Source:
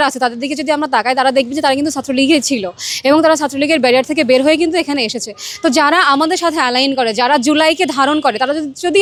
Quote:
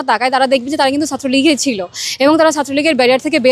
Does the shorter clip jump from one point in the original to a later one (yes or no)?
no